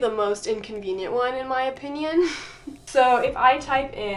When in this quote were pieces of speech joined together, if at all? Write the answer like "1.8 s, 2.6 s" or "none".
none